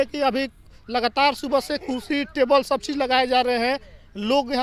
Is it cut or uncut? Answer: uncut